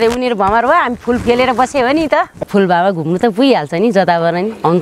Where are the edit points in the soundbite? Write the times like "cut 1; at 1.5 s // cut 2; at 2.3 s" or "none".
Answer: cut 1; at 2.4 s